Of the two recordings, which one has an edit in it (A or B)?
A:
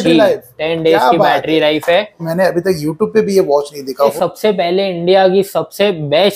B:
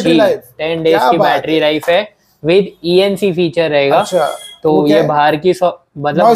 A